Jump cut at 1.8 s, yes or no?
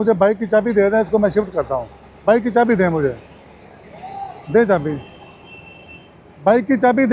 no